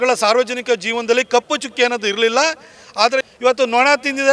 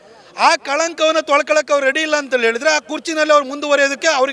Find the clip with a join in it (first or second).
first